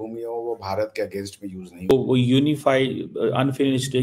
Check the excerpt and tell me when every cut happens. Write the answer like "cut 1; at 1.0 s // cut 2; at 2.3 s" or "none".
cut 1; at 1.9 s